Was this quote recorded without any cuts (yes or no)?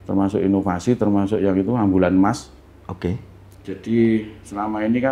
yes